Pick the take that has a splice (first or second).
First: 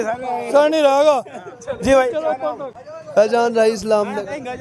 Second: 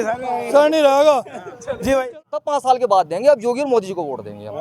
second